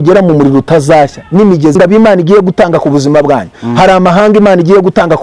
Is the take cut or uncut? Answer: cut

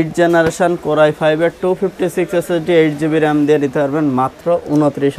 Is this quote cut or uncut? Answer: uncut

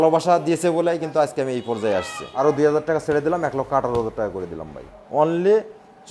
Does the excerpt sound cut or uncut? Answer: cut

